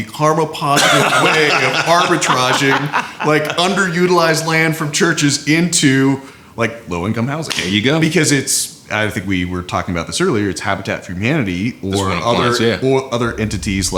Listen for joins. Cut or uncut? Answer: uncut